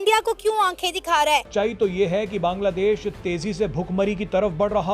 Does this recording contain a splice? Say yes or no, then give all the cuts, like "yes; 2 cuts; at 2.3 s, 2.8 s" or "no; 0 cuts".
yes; 1 cut; at 1.5 s